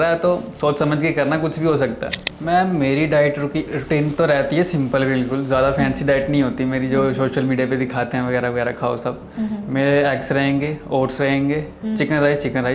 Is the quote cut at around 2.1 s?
yes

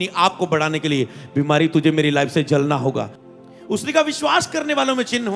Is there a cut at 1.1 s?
no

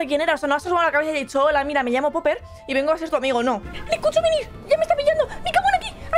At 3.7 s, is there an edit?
yes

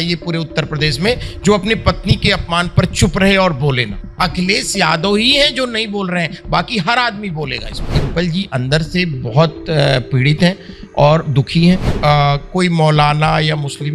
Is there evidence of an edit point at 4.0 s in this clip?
yes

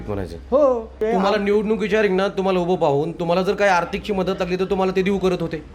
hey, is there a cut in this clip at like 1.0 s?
yes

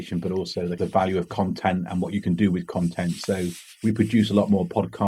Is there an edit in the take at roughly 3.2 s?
no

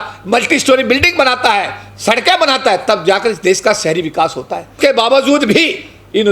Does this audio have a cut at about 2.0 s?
no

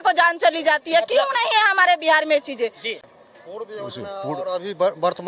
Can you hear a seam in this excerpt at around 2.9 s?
yes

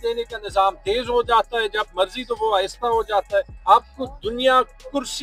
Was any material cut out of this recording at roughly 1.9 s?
no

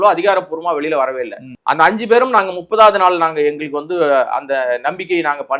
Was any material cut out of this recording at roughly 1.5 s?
yes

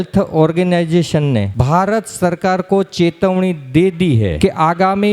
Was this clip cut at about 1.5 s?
yes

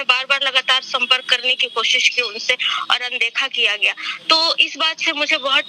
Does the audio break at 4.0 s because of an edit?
no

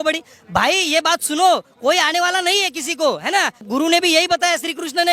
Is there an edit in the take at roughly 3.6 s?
yes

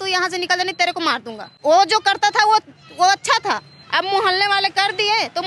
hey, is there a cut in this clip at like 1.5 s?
yes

